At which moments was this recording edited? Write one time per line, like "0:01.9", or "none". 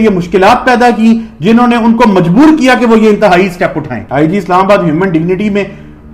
0:04.0